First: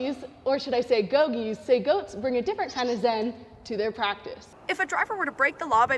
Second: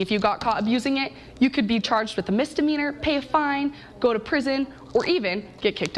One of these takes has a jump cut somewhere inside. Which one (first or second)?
first